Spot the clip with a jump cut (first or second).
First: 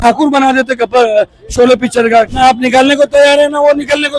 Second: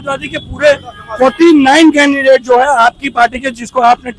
first